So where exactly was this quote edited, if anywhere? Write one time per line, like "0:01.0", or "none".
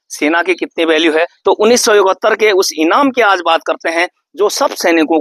0:01.3